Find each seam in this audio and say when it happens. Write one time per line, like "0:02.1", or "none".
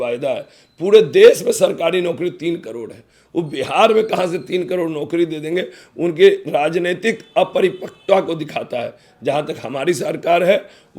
none